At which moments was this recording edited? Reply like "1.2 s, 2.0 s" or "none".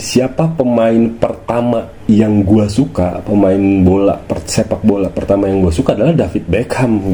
none